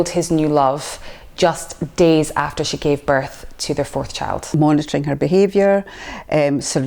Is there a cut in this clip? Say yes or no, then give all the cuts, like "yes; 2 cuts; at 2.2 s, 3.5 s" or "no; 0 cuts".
yes; 1 cut; at 4.5 s